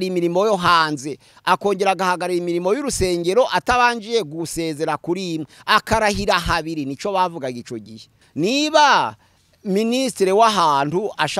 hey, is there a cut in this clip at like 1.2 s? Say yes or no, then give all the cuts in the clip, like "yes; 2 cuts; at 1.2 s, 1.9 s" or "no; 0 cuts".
no; 1 cut; at 8.2 s